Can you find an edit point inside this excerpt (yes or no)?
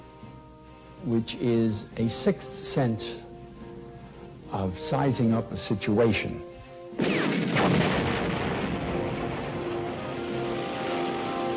yes